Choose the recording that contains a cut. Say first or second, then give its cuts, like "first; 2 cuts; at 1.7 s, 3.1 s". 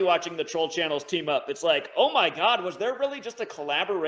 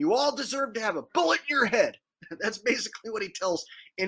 second; 1 cut; at 2.2 s